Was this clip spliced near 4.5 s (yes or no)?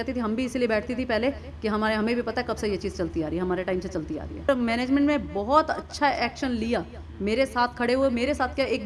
yes